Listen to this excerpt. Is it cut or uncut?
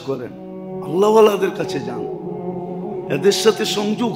cut